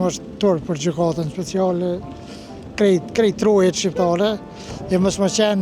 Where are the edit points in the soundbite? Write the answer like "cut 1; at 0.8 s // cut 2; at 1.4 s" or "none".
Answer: cut 1; at 2.7 s